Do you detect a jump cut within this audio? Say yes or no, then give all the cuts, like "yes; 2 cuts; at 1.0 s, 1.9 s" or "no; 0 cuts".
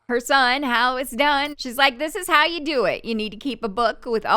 yes; 1 cut; at 1.6 s